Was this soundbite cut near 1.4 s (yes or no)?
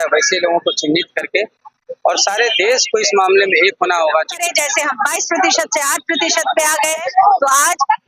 no